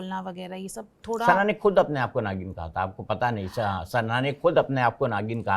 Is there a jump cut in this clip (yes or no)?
no